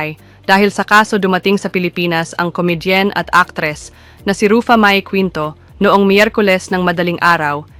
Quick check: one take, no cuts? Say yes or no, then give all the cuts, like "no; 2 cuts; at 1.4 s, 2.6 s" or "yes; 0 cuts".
yes; 0 cuts